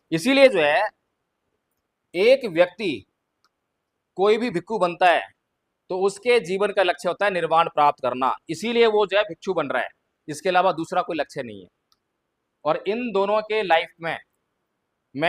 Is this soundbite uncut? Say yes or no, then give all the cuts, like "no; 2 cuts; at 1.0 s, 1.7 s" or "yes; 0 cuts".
yes; 0 cuts